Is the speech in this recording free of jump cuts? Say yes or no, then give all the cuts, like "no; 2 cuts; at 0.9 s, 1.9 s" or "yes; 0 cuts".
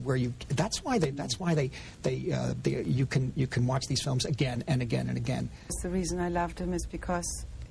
no; 1 cut; at 5.8 s